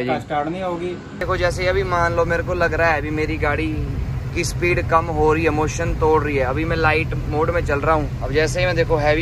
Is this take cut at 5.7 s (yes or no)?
no